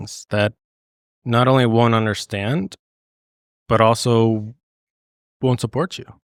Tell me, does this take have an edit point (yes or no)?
no